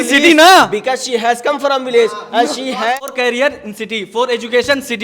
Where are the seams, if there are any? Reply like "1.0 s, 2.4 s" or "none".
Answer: 2.9 s